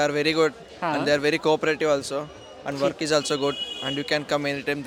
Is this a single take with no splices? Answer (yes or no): yes